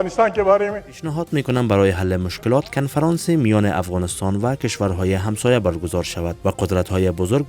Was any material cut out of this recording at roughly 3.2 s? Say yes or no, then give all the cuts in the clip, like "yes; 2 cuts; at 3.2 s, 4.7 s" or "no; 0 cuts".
no; 1 cut; at 1.0 s